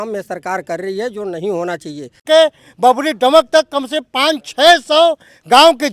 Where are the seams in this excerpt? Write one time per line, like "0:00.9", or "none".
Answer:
0:02.2